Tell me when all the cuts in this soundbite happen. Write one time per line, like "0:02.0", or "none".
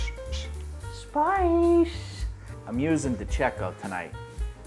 none